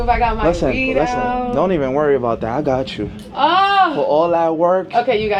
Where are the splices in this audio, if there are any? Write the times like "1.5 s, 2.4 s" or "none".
none